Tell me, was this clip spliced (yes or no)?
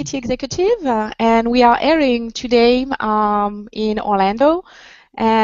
no